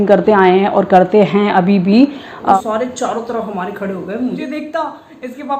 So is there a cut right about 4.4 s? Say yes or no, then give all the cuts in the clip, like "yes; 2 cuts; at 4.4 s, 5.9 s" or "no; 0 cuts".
yes; 2 cuts; at 2.5 s, 4.4 s